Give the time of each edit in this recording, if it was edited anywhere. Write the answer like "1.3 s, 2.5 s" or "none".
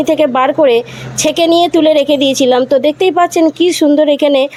none